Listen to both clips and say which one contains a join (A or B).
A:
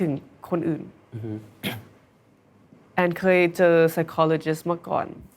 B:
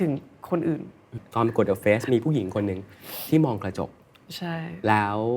B